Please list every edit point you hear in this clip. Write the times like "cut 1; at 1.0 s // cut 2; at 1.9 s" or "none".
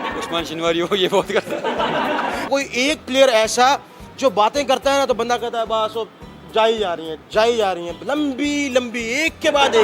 cut 1; at 2.4 s